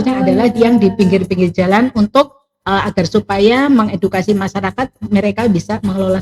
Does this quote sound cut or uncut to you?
uncut